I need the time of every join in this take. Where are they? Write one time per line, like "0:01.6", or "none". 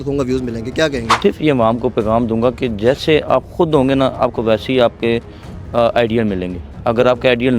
0:01.1